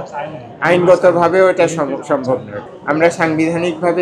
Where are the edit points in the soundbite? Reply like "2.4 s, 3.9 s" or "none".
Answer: 2.5 s